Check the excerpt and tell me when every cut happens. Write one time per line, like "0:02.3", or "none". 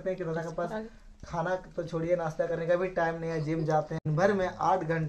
0:04.0